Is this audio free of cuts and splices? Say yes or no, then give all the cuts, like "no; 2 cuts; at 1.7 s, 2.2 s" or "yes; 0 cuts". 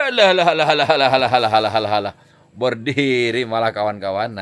yes; 0 cuts